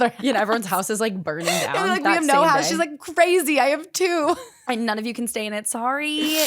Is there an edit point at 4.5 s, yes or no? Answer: yes